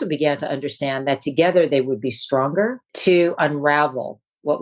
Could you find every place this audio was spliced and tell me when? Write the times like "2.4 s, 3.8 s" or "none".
2.9 s